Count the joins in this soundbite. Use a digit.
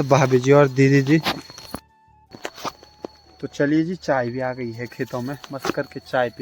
1